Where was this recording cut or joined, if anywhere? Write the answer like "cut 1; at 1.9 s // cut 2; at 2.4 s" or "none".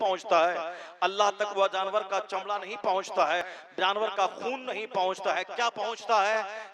cut 1; at 3.4 s